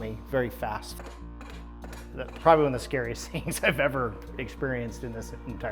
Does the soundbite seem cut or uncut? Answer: uncut